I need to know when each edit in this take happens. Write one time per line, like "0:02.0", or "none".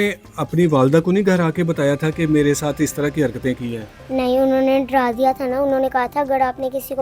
0:03.8